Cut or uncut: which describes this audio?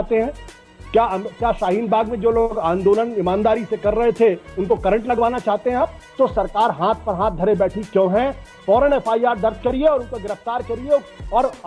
cut